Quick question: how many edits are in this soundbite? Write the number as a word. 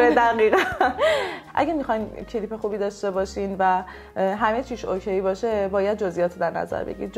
one